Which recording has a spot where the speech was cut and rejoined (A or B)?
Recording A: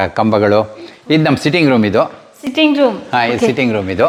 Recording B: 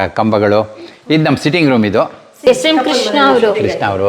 B